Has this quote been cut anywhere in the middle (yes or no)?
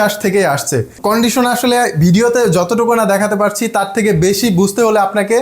yes